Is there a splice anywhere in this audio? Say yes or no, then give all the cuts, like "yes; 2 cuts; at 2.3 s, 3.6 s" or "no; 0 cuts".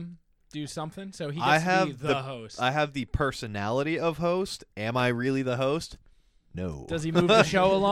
no; 0 cuts